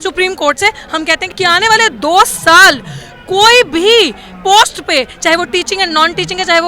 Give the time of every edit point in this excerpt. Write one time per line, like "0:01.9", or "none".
0:01.2